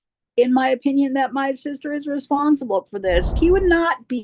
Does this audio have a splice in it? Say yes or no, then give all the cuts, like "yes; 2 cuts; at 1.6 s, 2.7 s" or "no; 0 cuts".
yes; 1 cut; at 3.3 s